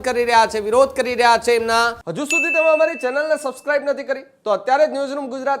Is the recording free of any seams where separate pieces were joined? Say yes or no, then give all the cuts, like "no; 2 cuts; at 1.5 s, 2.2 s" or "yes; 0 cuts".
no; 1 cut; at 2.2 s